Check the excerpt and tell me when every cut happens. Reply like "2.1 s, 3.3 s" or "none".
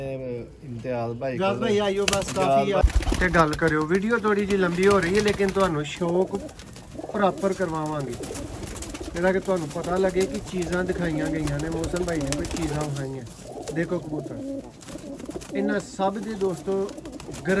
2.8 s